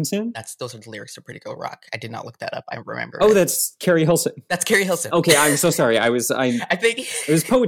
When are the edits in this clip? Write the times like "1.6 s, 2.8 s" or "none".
none